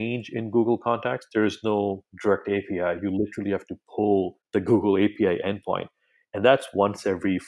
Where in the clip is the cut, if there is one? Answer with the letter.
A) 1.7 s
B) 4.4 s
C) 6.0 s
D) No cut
B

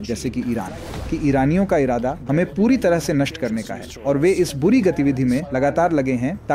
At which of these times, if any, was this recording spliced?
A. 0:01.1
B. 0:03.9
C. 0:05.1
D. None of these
A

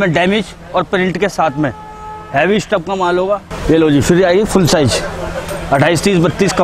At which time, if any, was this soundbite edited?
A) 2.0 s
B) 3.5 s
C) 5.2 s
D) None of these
B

